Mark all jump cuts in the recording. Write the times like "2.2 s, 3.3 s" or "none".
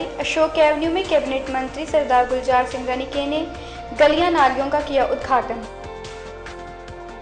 none